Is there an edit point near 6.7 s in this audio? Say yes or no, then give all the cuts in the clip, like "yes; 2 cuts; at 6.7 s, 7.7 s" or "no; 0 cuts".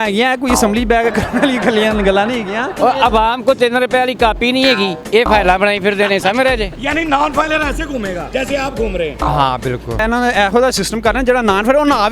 yes; 5 cuts; at 2.7 s, 5.0 s, 6.7 s, 8.2 s, 10.0 s